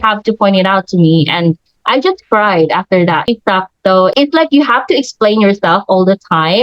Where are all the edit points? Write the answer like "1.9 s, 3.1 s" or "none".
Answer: 3.3 s